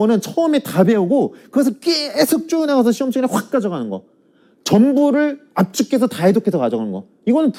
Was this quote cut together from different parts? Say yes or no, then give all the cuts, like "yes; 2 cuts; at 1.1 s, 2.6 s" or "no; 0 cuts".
no; 0 cuts